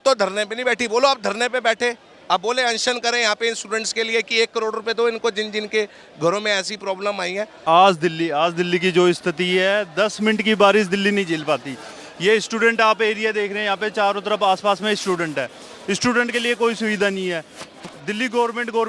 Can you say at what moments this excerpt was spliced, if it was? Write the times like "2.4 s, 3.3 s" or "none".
7.6 s